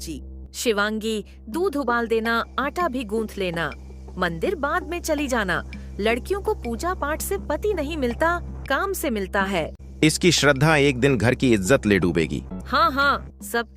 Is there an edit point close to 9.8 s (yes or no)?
yes